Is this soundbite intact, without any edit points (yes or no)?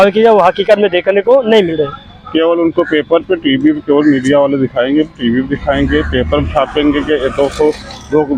yes